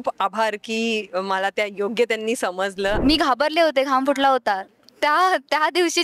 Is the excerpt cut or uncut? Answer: cut